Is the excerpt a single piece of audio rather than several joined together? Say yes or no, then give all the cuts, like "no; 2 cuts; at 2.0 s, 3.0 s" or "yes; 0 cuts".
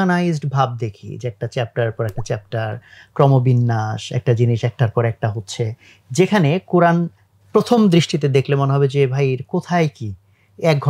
yes; 0 cuts